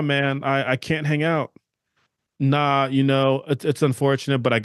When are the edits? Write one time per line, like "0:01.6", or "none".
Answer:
none